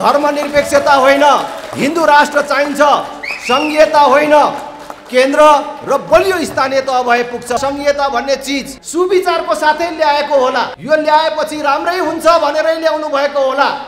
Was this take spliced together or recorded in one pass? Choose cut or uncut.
cut